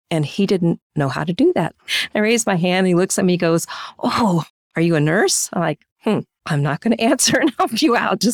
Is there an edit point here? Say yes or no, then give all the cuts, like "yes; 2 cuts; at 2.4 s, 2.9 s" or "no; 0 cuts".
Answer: yes; 1 cut; at 1.8 s